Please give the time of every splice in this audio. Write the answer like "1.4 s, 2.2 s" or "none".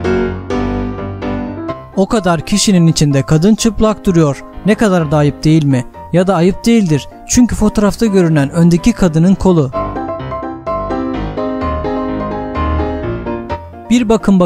0.9 s